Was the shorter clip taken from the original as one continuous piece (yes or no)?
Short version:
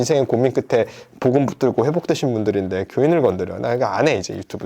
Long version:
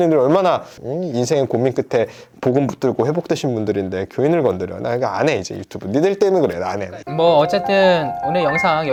yes